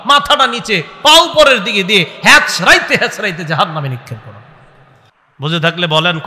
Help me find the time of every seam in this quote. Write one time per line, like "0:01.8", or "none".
0:05.0